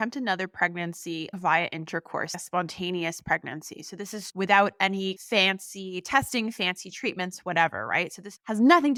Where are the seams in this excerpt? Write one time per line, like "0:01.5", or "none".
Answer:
none